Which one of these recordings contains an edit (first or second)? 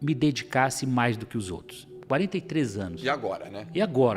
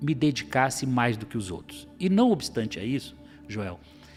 first